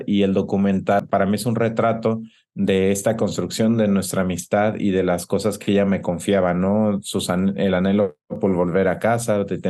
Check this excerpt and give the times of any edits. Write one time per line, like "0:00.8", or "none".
none

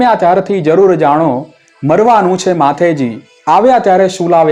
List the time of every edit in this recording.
none

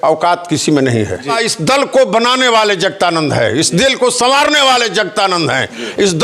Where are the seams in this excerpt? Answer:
0:01.3

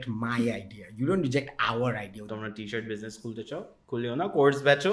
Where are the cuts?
0:02.3

